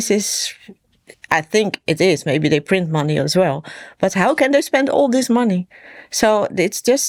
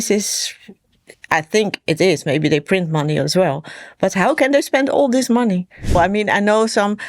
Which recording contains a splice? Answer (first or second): second